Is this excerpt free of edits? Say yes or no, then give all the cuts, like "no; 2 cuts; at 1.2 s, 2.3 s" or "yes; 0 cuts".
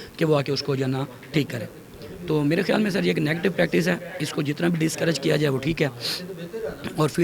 yes; 0 cuts